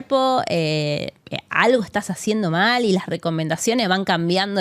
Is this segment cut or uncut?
uncut